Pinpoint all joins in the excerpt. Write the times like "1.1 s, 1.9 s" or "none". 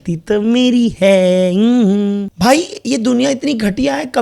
2.3 s